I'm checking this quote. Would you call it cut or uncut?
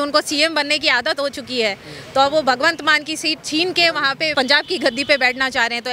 cut